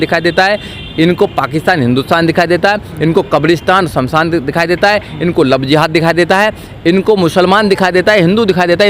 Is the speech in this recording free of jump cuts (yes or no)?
yes